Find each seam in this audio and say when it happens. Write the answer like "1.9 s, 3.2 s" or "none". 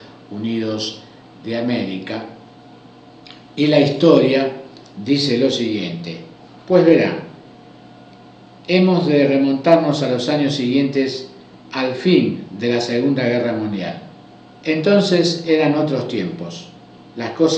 7.1 s